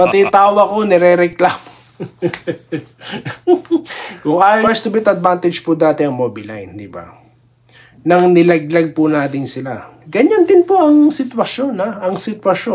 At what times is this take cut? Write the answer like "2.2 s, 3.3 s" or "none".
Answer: 4.7 s